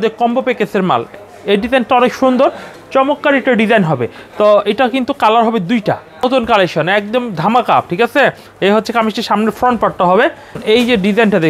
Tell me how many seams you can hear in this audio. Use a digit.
3